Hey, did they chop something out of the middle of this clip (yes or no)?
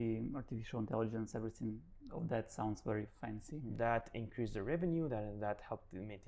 yes